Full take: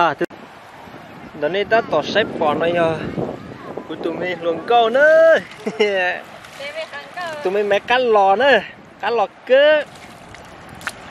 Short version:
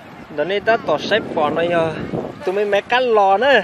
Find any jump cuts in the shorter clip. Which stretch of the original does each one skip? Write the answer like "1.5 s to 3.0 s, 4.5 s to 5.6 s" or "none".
3.4 s to 7.3 s